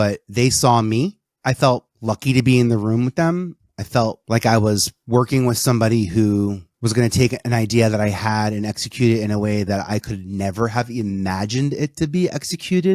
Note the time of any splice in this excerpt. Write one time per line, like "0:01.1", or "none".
0:01.3
0:01.9
0:04.2
0:04.9
0:06.7